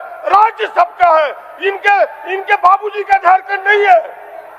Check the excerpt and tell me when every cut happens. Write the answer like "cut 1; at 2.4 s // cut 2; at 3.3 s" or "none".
none